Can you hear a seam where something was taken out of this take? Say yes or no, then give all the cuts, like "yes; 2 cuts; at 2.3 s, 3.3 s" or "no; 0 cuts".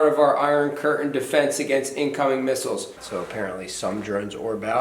yes; 1 cut; at 3.0 s